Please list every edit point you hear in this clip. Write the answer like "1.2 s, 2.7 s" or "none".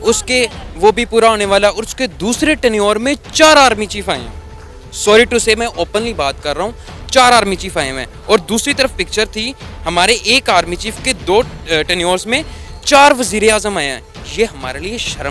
11.2 s